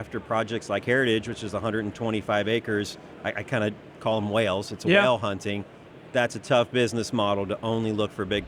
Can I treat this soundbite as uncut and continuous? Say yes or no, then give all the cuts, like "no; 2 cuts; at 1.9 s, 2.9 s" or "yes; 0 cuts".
yes; 0 cuts